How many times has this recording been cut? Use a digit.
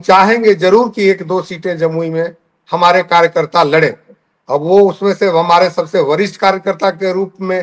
0